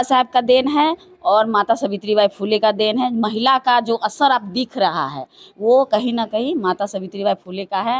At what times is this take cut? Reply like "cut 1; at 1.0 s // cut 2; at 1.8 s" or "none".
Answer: none